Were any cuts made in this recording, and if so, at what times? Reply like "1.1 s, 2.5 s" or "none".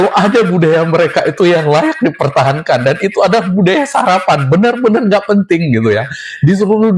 none

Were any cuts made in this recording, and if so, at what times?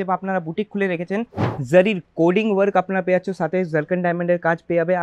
1.4 s

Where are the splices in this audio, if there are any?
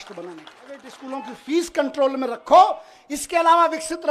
1.0 s

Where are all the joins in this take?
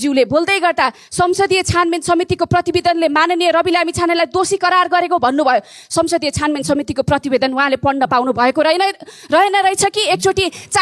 none

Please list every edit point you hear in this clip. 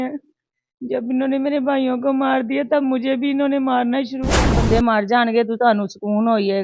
4.6 s

